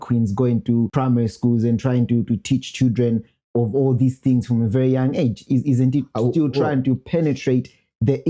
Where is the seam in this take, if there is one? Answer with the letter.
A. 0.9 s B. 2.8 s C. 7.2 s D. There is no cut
A